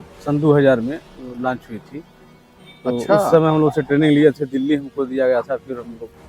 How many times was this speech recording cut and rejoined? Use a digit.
0